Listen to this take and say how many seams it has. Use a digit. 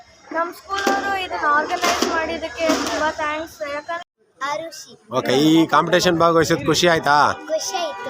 1